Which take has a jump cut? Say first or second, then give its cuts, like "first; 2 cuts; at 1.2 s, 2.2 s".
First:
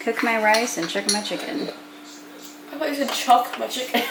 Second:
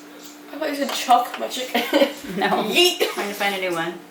second; 1 cut; at 3.1 s